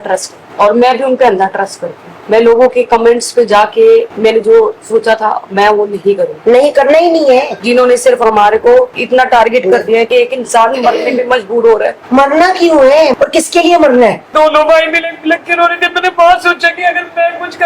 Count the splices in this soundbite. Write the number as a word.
four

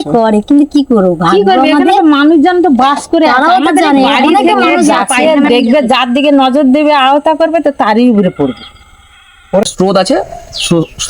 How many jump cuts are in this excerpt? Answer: two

